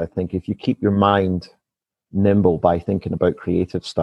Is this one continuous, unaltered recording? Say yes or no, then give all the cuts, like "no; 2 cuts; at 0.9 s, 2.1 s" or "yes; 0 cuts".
yes; 0 cuts